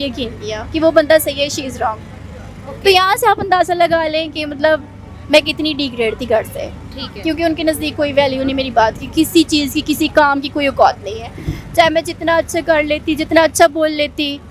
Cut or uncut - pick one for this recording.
uncut